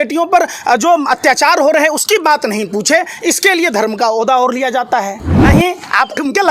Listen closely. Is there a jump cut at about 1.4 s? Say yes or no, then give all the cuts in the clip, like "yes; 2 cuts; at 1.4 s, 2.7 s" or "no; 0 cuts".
no; 1 cut; at 5.3 s